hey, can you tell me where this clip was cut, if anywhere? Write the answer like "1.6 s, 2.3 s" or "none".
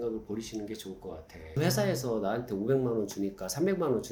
none